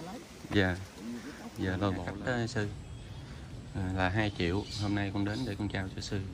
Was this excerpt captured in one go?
no; 1 cut; at 2.0 s

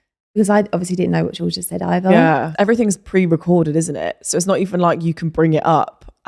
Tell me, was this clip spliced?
yes; 1 cut; at 2.5 s

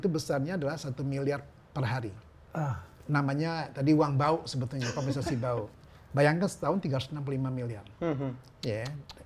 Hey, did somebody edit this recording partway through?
no; 0 cuts

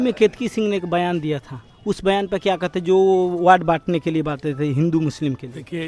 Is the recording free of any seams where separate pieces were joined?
yes; 0 cuts

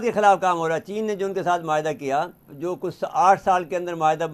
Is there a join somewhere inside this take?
yes; 1 cut; at 2.5 s

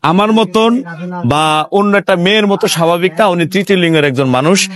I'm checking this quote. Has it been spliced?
no; 0 cuts

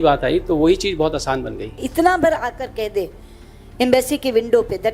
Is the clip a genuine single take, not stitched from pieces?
no; 1 cut; at 1.8 s

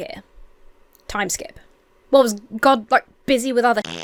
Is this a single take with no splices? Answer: yes; 0 cuts

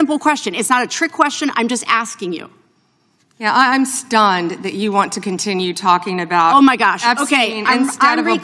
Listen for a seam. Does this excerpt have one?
no; 0 cuts

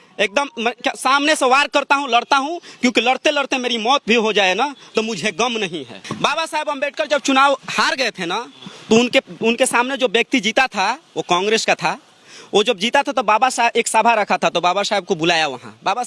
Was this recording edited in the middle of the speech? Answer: yes; 1 cut; at 6.0 s

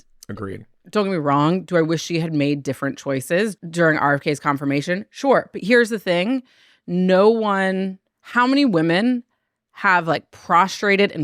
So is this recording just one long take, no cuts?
no; 1 cut; at 3.6 s

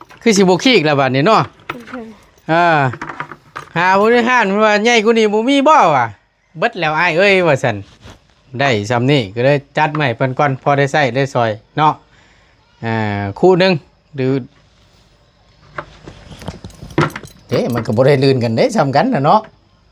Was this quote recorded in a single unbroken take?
yes; 0 cuts

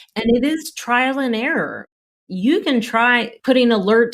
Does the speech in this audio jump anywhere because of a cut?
yes; 2 cuts; at 2.1 s, 3.3 s

